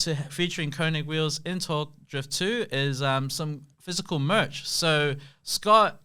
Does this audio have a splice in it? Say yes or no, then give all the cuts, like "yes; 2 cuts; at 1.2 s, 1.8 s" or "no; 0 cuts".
no; 0 cuts